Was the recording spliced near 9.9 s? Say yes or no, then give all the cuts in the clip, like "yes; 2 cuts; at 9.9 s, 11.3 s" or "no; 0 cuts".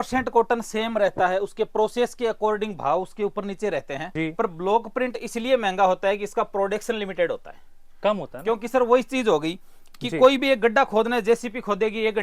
no; 1 cut; at 4.0 s